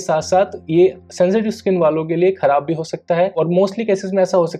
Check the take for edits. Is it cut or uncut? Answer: uncut